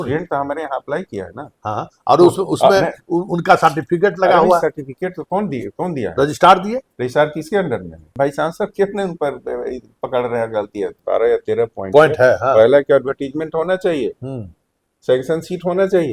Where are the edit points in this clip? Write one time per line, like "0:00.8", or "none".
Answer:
0:08.1
0:11.0